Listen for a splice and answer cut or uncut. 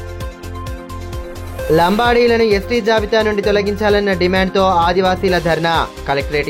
cut